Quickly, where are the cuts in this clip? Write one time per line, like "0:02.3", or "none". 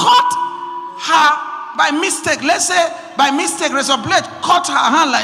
none

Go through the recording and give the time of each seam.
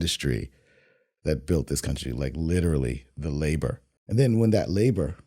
0:03.9

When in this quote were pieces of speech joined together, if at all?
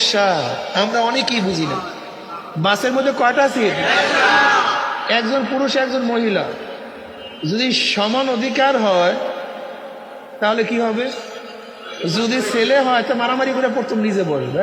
none

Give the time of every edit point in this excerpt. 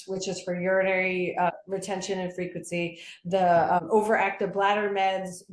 0:01.5
0:03.8

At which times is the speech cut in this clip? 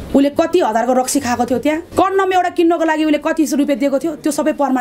0:01.9

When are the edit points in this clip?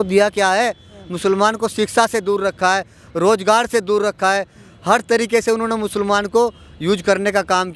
none

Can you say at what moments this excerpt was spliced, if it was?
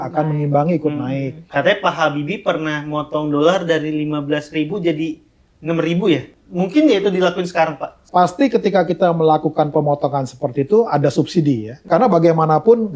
0:01.5
0:06.4
0:08.1
0:11.7

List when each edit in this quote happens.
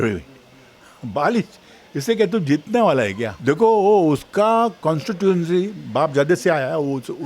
0:03.3

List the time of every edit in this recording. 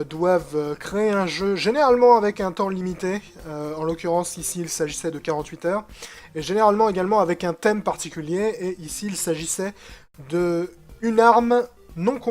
0:09.3

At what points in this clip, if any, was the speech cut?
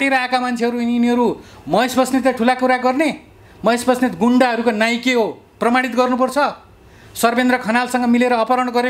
none

